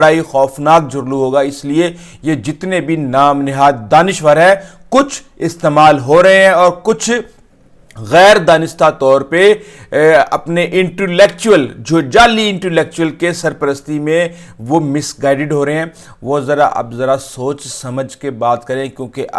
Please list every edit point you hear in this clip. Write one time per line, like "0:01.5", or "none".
none